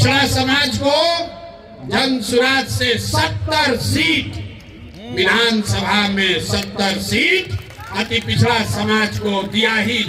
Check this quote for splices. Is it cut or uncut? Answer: uncut